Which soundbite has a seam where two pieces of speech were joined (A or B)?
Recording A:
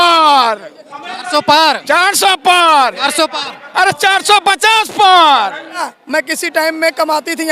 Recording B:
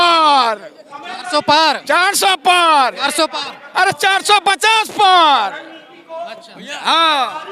A